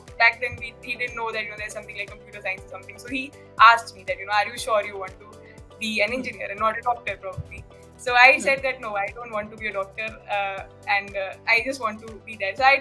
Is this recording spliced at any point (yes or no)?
no